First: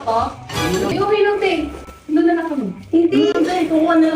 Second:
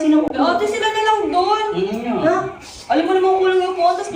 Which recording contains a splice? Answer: first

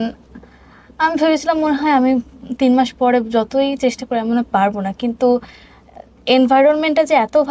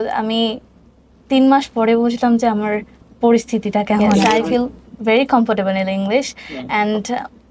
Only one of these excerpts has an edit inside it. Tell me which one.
second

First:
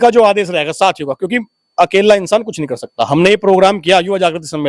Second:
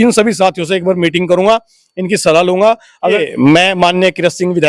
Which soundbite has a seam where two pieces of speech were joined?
second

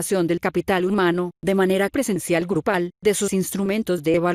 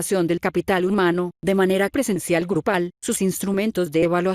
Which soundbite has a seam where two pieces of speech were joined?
second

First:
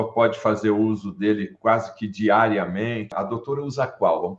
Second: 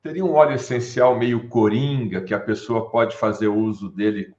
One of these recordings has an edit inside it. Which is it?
first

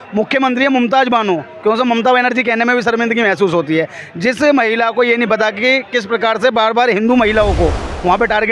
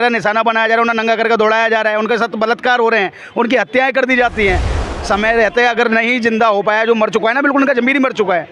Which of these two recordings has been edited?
second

